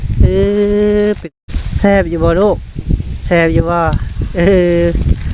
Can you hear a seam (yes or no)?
yes